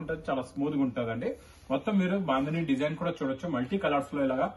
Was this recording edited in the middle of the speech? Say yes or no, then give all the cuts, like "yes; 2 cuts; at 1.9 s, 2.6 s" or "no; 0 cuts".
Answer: no; 0 cuts